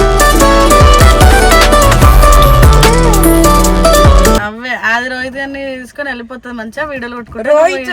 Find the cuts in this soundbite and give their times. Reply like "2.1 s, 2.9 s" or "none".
4.5 s